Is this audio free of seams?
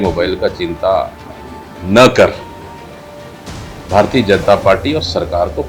yes; 0 cuts

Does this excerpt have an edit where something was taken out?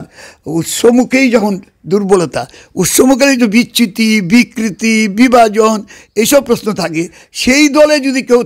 no; 0 cuts

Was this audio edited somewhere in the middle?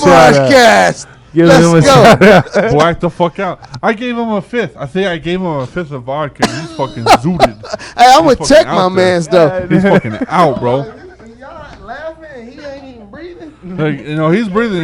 no; 0 cuts

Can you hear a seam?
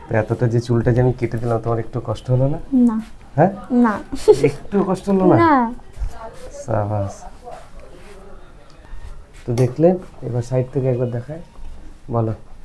yes; 1 cut; at 8.8 s

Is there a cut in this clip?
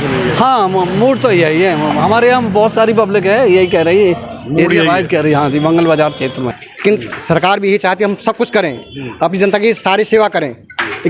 yes; 1 cut; at 6.6 s

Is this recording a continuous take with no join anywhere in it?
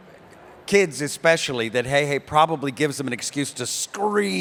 yes; 0 cuts

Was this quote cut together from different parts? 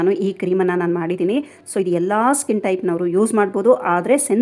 no; 0 cuts

